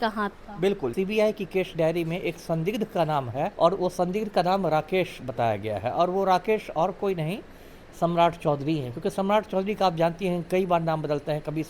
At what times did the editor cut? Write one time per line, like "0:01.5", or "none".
0:00.9
0:03.5